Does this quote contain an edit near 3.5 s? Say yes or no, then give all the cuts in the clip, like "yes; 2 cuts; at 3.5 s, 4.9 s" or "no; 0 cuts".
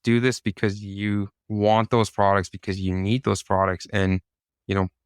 no; 1 cut; at 1.4 s